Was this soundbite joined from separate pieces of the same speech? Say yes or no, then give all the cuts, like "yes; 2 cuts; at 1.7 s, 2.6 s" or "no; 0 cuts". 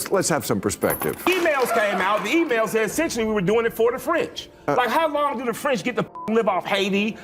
yes; 1 cut; at 1.2 s